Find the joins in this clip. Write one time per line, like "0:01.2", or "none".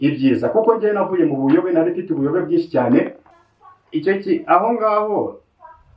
0:03.2